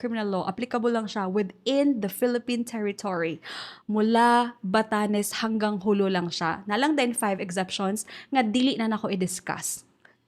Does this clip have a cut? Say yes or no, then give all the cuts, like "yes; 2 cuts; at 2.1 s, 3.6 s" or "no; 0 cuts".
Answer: no; 0 cuts